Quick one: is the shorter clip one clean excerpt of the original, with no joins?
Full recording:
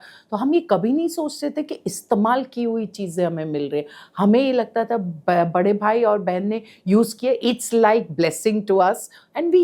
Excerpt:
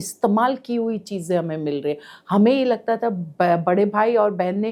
yes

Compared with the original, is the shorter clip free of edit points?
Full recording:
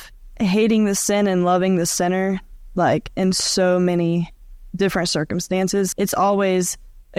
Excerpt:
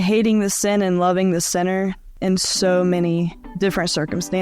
no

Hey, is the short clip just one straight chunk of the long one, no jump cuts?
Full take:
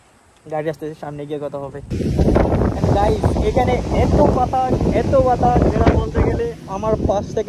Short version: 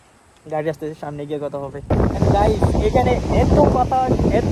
no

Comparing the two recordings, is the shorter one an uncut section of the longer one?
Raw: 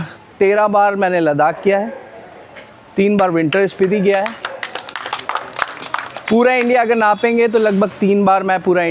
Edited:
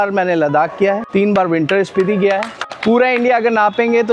no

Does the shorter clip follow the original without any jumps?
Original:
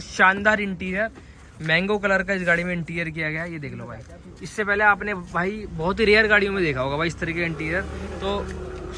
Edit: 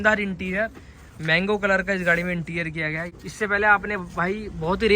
no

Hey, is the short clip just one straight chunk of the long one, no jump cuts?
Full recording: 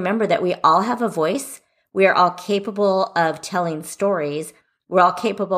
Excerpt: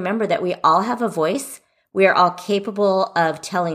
yes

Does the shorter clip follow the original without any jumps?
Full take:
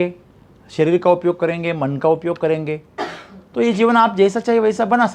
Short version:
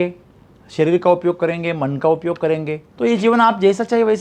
no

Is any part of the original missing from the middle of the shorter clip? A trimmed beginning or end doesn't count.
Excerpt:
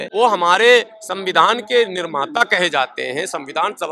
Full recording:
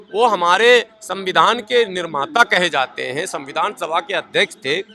no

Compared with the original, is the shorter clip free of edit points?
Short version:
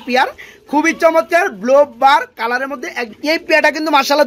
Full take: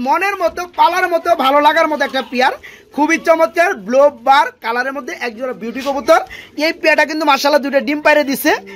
no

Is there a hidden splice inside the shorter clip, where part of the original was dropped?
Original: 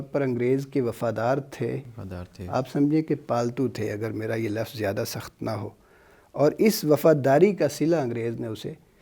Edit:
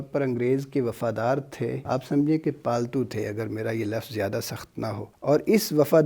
yes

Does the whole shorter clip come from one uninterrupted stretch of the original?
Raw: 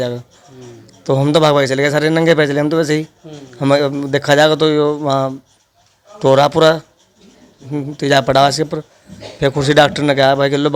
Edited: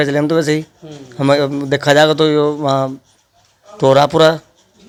yes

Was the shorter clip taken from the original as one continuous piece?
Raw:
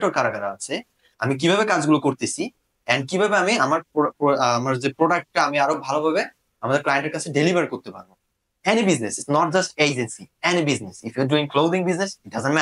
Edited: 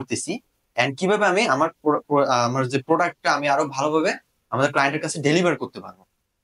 yes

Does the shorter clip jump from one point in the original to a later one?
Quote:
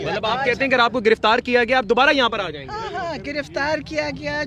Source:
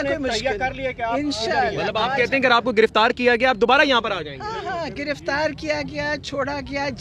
no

